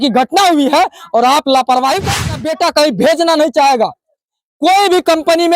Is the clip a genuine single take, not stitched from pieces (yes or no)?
no